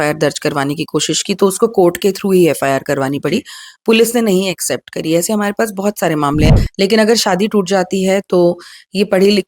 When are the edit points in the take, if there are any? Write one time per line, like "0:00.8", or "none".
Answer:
0:06.5